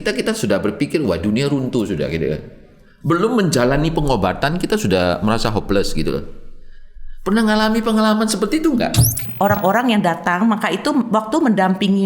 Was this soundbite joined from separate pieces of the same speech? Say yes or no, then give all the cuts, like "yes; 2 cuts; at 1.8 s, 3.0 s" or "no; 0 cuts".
yes; 1 cut; at 9.2 s